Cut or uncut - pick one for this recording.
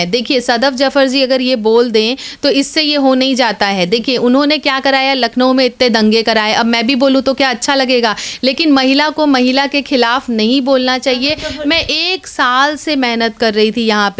uncut